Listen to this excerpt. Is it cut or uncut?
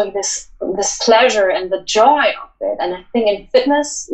uncut